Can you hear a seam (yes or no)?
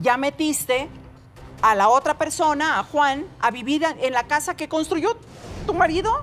no